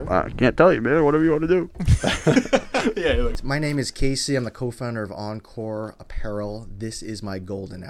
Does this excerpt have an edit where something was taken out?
yes; 1 cut; at 3.4 s

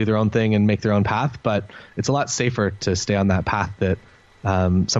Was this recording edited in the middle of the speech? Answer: no; 0 cuts

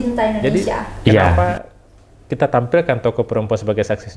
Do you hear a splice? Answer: yes; 1 cut; at 1.3 s

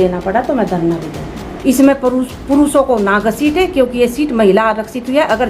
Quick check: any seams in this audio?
yes; 1 cut; at 1.5 s

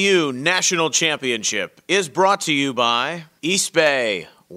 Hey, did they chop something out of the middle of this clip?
yes; 1 cut; at 3.2 s

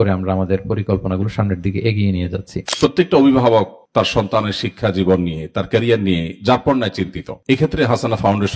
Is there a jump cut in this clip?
yes; 1 cut; at 2.6 s

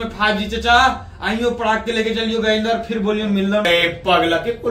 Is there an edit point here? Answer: yes; 1 cut; at 3.7 s

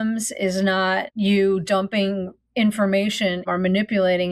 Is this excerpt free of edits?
no; 2 cuts; at 1.1 s, 3.4 s

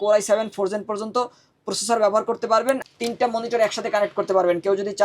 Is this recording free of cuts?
no; 1 cut; at 2.9 s

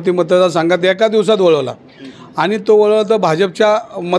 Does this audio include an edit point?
no; 0 cuts

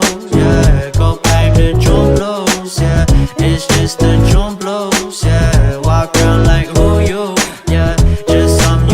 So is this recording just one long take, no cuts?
no; 1 cut; at 1.2 s

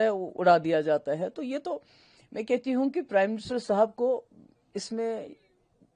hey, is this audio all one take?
yes; 0 cuts

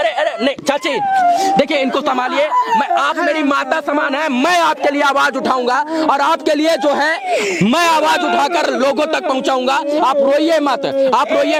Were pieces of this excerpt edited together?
no; 0 cuts

